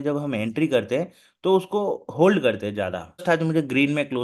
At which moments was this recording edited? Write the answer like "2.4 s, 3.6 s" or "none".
3.2 s